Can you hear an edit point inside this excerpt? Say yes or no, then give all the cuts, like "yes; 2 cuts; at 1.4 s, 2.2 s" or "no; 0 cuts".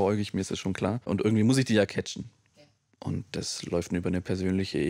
yes; 1 cut; at 1.1 s